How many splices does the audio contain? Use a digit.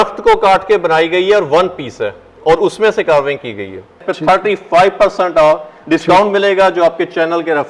1